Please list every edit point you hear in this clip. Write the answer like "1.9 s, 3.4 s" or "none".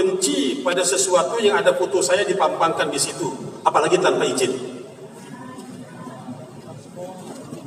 none